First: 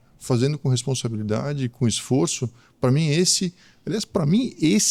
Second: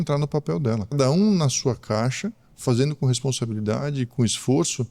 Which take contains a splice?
second; 1 cut; at 0.9 s

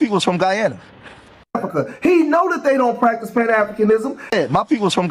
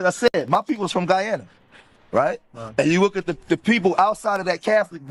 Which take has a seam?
first; 2 cuts; at 1.4 s, 4.2 s

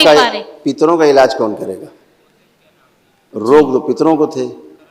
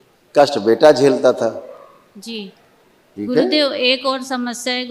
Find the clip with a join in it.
second; 1 cut; at 3.0 s

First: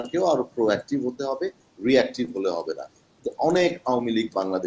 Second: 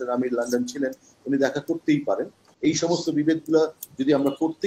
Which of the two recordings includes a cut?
second; 1 cut; at 2.5 s

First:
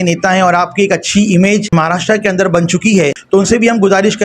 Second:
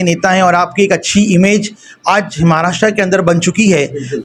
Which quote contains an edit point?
first; 2 cuts; at 1.7 s, 3.2 s

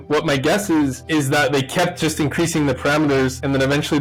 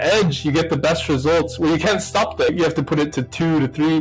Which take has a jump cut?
second; 1 cut; at 2.5 s

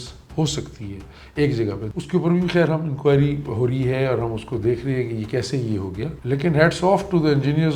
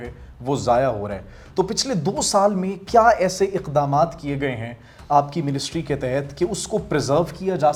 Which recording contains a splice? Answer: first; 2 cuts; at 1.9 s, 6.2 s

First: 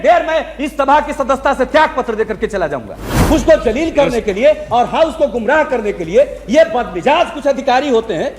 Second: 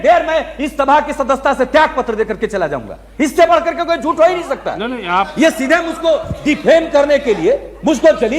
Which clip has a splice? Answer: first; 1 cut; at 3.1 s

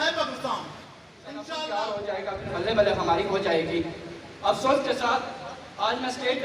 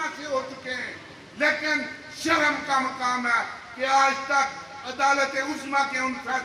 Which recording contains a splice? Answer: first; 1 cut; at 1.4 s

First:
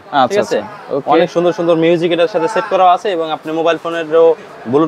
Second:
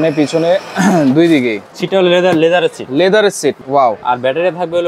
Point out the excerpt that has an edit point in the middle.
second; 2 cuts; at 1.7 s, 3.6 s

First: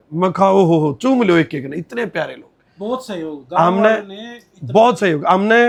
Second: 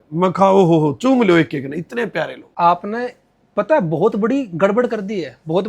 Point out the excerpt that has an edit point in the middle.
second; 1 cut; at 2.4 s

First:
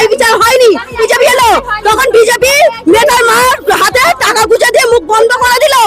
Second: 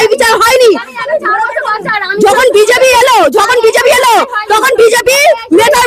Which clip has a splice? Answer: first; 1 cut; at 1.0 s

